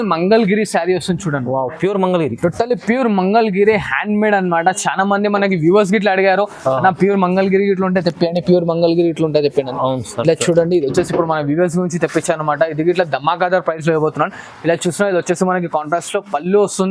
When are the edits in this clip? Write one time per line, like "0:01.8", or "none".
none